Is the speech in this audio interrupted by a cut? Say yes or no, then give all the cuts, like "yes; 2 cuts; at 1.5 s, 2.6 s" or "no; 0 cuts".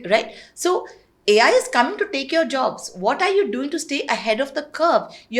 no; 0 cuts